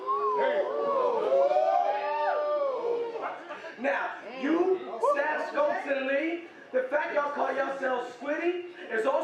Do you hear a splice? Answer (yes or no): yes